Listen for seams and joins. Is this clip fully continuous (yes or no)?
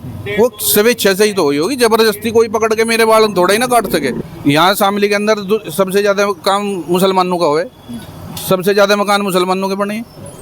no